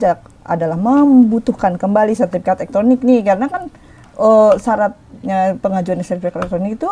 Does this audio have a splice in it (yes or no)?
no